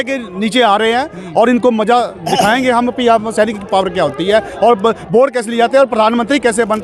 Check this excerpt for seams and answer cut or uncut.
uncut